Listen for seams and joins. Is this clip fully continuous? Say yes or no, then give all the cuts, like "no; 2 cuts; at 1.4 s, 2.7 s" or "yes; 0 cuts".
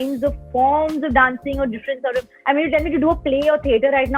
no; 1 cut; at 2.3 s